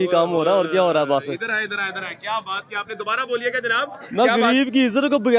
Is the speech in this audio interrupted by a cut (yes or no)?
no